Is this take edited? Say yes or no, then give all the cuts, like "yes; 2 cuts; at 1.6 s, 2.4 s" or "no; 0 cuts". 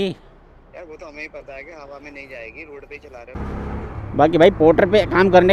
yes; 1 cut; at 3.3 s